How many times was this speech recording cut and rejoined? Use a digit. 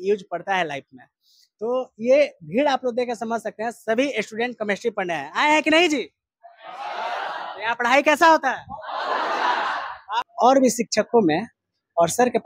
1